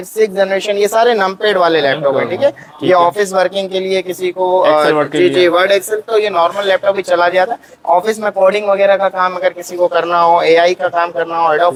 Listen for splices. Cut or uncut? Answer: uncut